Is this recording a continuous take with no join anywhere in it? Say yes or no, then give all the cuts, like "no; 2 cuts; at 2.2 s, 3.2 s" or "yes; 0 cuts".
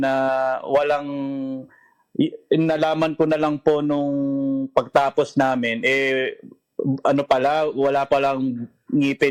yes; 0 cuts